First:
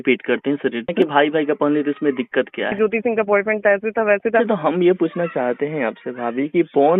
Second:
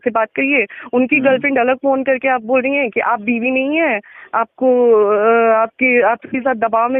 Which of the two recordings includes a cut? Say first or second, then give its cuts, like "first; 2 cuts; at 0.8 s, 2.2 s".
first; 3 cuts; at 0.9 s, 2.7 s, 4.4 s